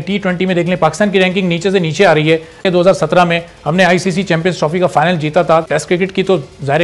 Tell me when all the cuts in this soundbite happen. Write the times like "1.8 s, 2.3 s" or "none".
2.7 s, 5.7 s